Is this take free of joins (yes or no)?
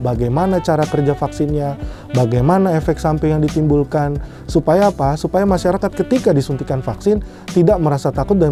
yes